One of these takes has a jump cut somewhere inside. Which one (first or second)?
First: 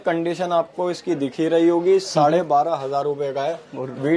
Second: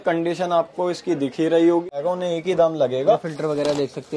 second